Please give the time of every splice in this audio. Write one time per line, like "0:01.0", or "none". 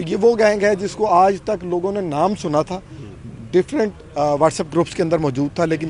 none